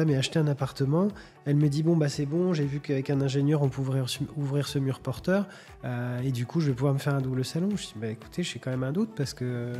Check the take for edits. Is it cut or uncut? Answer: uncut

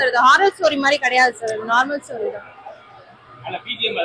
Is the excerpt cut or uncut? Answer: uncut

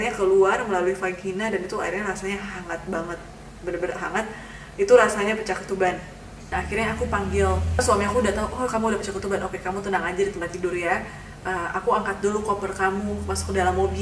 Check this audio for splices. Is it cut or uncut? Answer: uncut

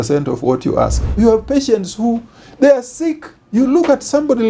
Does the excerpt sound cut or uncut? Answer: cut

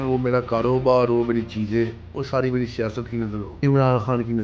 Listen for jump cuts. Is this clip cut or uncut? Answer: cut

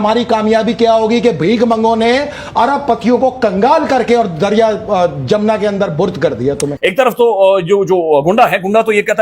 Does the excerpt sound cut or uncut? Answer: cut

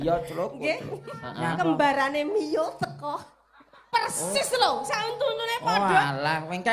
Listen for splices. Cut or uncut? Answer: cut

